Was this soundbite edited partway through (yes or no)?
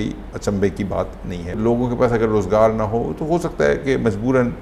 yes